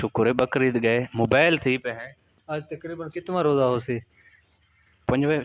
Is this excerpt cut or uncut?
uncut